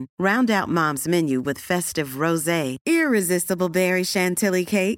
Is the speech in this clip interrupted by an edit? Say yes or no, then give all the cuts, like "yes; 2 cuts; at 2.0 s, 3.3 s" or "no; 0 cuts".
no; 0 cuts